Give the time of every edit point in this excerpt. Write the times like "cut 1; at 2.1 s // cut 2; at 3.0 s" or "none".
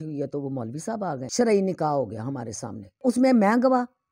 cut 1; at 1.2 s // cut 2; at 3.0 s